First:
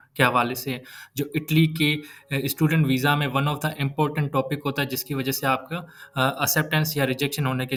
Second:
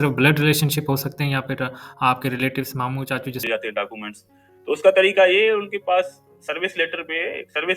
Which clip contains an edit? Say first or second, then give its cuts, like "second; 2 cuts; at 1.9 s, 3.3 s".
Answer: second; 1 cut; at 3.5 s